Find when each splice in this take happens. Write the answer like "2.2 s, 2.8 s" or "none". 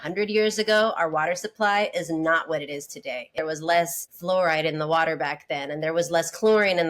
3.4 s